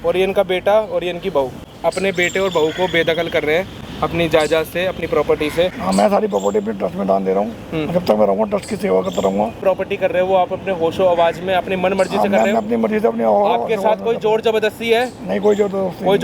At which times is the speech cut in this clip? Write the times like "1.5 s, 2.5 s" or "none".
1.7 s, 5.8 s, 9.6 s